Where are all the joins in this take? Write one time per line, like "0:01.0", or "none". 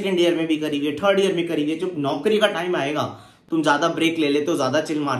0:03.3